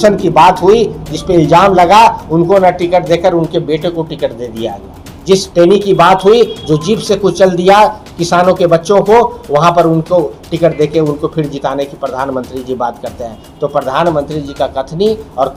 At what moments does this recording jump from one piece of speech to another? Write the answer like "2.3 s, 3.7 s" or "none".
none